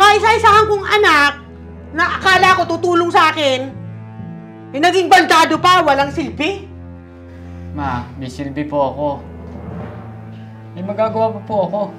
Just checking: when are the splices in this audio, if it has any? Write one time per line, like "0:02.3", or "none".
0:09.2
0:10.7